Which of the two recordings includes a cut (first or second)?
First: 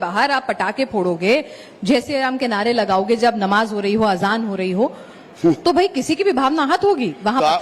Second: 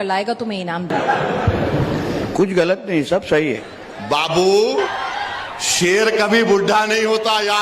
second